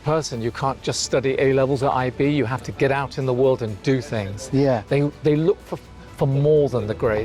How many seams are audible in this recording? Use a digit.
0